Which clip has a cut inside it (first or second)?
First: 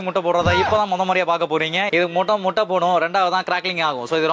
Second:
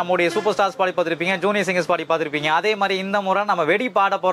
first